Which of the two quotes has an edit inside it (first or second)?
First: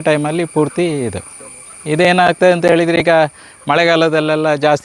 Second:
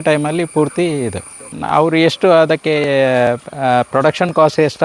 second